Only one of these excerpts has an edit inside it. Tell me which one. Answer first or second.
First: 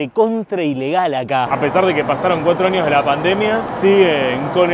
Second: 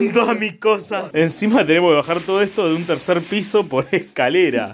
first